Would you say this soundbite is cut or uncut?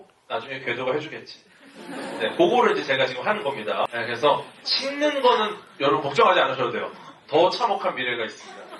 cut